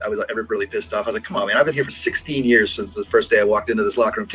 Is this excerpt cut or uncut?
uncut